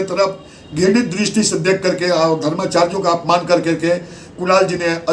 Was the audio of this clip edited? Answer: no; 0 cuts

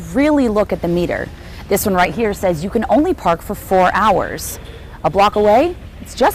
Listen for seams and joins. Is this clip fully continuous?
yes; 0 cuts

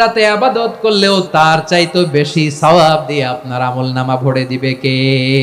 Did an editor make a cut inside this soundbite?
yes; 1 cut; at 1.0 s

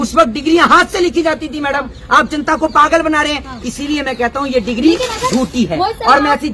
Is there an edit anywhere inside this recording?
no; 0 cuts

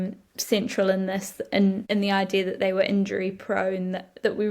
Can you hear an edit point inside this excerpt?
yes; 1 cut; at 1.8 s

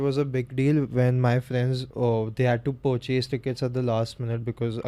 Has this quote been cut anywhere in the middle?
yes; 1 cut; at 1.8 s

